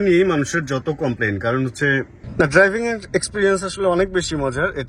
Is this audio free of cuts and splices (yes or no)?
no